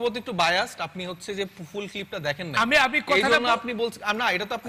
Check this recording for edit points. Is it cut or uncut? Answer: uncut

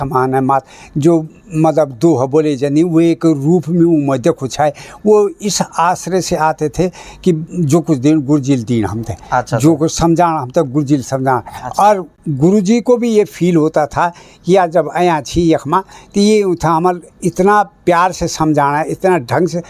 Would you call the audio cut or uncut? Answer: uncut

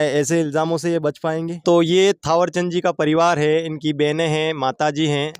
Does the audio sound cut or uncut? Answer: cut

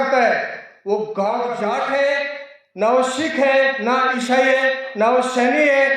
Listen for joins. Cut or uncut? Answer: cut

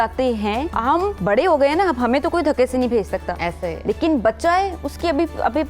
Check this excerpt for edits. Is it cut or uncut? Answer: cut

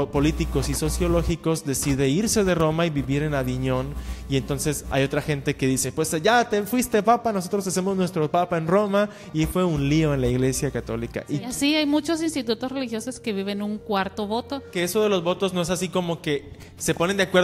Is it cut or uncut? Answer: cut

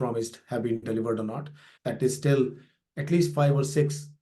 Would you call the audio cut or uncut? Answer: cut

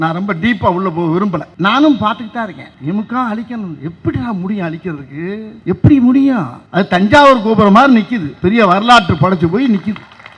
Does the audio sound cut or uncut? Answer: cut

